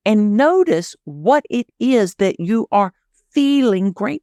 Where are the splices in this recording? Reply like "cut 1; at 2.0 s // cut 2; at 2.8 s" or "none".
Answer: none